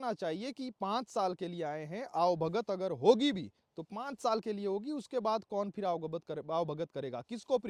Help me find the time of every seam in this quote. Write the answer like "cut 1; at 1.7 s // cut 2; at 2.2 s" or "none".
none